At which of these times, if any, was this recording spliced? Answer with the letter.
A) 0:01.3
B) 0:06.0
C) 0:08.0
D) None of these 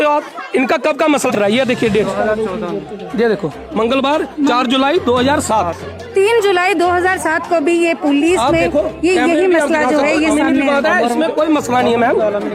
A